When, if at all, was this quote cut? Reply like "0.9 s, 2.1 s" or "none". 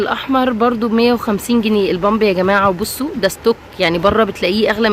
none